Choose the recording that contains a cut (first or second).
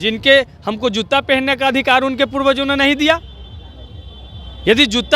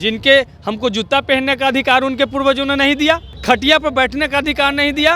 second